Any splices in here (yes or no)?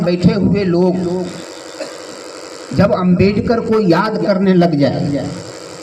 no